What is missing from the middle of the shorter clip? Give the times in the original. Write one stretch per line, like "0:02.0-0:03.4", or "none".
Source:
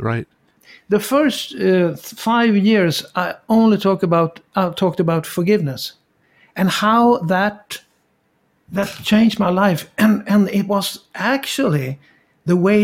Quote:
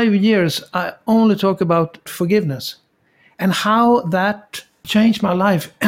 0:04.5-0:05.2
0:08.0-0:09.0